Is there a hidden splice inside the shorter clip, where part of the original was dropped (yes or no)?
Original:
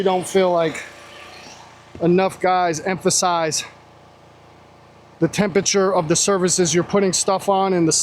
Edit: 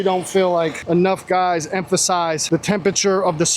yes